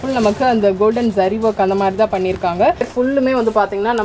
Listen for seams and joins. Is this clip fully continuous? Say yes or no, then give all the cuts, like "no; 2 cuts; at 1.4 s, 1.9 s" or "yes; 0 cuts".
no; 1 cut; at 2.9 s